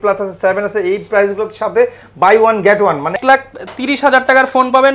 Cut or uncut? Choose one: cut